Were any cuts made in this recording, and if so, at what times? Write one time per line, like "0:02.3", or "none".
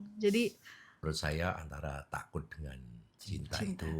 0:01.0